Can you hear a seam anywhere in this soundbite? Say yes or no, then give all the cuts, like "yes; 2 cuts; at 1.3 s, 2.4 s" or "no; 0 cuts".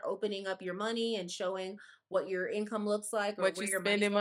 no; 0 cuts